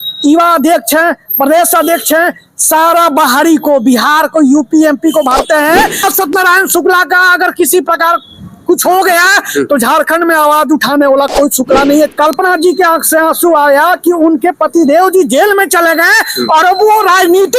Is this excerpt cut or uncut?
cut